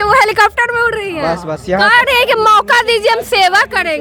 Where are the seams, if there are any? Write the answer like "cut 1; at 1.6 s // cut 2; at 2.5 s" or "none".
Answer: none